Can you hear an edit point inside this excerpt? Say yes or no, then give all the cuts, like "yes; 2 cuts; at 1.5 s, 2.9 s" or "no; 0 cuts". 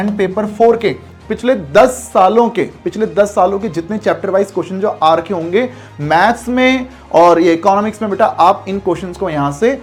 no; 0 cuts